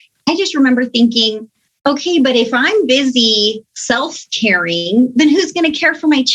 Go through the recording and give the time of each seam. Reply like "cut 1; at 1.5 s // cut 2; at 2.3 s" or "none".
cut 1; at 3.7 s